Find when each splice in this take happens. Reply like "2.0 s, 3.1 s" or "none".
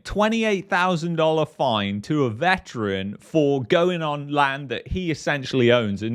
none